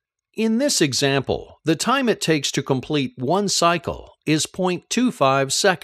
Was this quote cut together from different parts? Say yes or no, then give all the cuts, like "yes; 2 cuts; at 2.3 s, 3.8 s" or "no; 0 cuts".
no; 0 cuts